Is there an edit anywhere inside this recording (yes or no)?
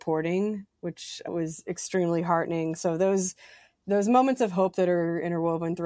yes